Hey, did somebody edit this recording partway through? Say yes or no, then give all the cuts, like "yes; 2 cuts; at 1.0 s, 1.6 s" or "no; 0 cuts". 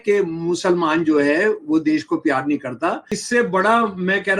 yes; 1 cut; at 3.2 s